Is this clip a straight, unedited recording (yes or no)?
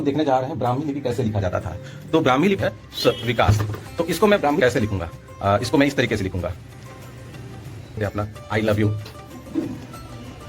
no